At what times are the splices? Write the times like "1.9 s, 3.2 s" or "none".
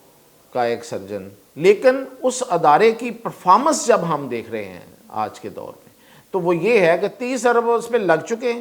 1.4 s